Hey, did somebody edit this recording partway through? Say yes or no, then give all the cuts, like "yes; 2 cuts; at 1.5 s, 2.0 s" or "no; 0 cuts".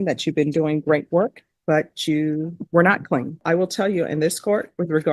yes; 1 cut; at 3.4 s